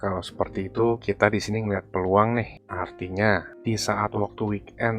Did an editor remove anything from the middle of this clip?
no; 0 cuts

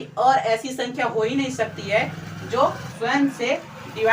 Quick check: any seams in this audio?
yes; 1 cut; at 2.9 s

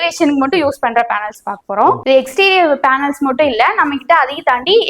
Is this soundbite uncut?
no; 1 cut; at 2.0 s

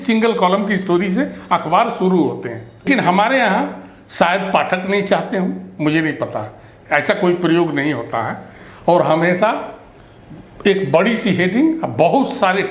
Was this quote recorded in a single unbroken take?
no; 1 cut; at 2.9 s

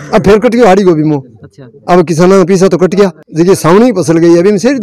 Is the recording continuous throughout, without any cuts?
no; 1 cut; at 3.2 s

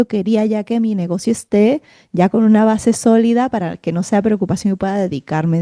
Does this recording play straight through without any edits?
yes; 0 cuts

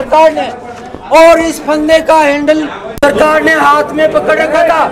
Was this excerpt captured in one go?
yes; 0 cuts

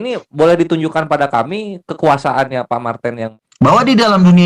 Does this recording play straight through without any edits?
no; 1 cut; at 3.3 s

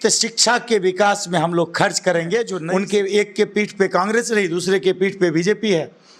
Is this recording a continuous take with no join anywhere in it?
no; 1 cut; at 2.6 s

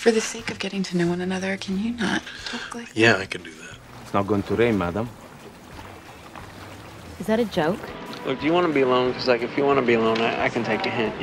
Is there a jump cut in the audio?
yes; 2 cuts; at 3.8 s, 7.9 s

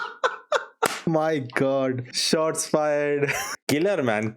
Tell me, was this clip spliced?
yes; 3 cuts; at 1.0 s, 2.1 s, 3.5 s

